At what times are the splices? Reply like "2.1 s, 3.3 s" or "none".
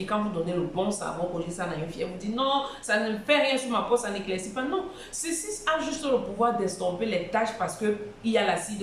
none